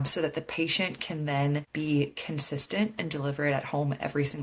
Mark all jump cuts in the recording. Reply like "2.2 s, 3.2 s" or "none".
1.5 s